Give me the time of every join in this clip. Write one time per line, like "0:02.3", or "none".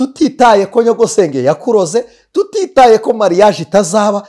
none